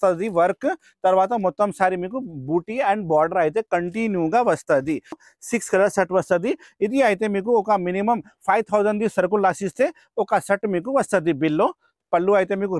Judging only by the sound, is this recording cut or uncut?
cut